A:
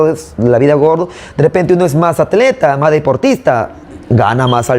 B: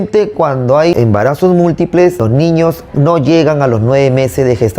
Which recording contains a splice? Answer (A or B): B